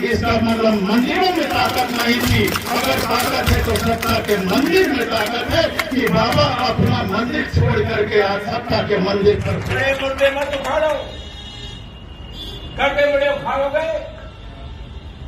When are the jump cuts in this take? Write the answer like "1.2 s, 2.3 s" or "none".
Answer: 9.7 s